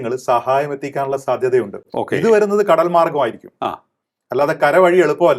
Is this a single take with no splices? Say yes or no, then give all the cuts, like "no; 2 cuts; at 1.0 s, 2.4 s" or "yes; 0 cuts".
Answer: yes; 0 cuts